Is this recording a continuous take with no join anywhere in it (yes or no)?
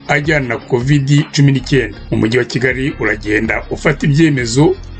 no